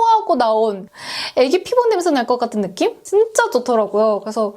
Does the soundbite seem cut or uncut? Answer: uncut